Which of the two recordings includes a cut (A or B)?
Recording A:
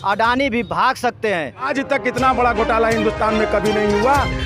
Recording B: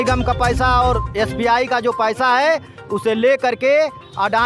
A